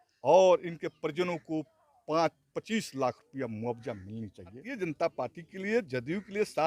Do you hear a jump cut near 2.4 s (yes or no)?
no